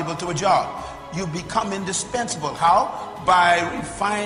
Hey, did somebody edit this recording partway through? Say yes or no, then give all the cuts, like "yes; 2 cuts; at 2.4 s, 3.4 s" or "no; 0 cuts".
no; 0 cuts